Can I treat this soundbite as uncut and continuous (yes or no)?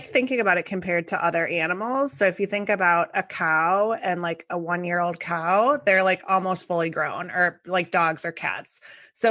yes